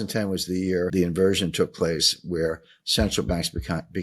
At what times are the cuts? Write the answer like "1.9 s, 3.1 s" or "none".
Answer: 0.9 s